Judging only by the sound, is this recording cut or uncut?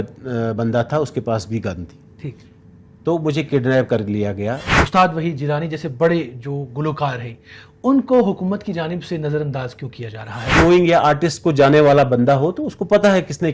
cut